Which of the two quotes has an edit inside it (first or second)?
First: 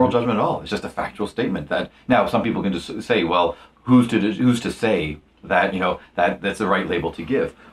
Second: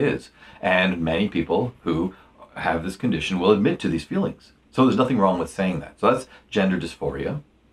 second